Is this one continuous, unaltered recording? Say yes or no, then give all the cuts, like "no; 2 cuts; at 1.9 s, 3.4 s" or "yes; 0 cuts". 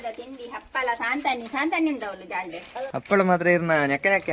no; 1 cut; at 2.9 s